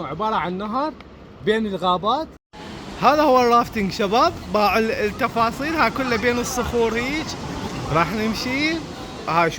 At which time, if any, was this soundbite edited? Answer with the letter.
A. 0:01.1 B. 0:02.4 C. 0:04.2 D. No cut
B